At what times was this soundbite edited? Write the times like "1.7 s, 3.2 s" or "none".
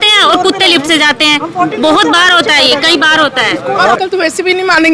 4.0 s